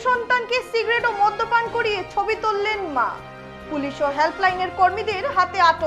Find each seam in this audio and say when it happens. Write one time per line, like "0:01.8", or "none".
none